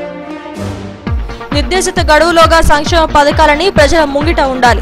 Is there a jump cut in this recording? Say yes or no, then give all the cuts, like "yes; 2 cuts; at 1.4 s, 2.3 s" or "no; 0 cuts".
no; 0 cuts